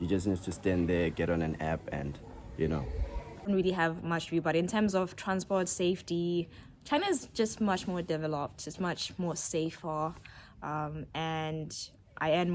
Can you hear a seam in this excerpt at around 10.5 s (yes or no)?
no